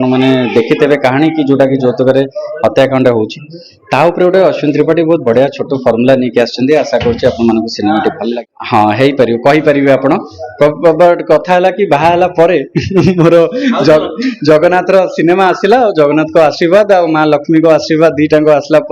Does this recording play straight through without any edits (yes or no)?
no